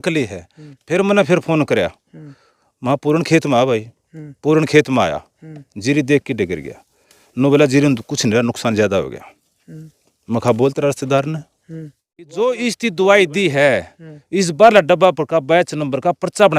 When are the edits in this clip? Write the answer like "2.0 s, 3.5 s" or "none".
12.3 s